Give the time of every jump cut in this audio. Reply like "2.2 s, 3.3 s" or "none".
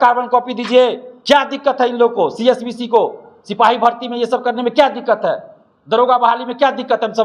1.1 s